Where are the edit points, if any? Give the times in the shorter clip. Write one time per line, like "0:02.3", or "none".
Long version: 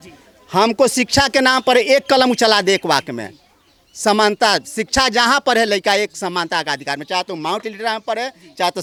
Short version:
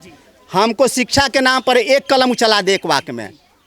none